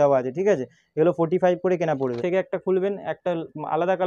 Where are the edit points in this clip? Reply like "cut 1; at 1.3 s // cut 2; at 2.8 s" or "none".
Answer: cut 1; at 2.2 s